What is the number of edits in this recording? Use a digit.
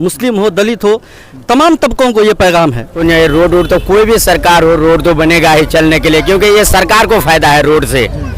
1